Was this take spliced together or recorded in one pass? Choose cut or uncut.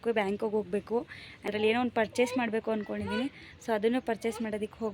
cut